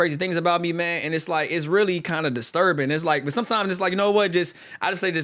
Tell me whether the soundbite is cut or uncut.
uncut